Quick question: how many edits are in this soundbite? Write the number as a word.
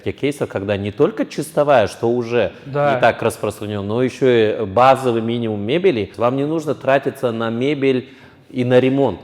one